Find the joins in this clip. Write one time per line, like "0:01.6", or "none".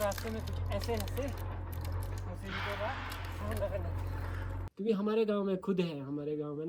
0:04.6